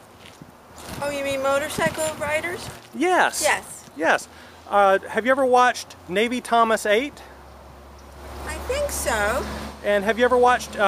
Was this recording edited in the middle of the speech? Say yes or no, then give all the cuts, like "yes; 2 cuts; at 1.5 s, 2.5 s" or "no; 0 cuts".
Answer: no; 0 cuts